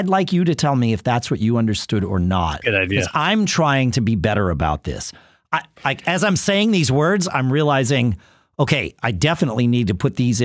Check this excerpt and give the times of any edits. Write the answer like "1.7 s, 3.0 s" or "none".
none